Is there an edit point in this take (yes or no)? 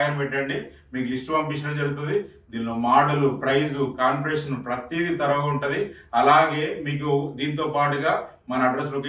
no